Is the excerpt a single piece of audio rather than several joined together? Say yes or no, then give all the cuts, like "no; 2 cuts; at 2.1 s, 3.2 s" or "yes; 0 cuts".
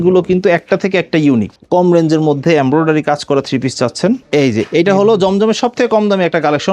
no; 2 cuts; at 1.6 s, 4.2 s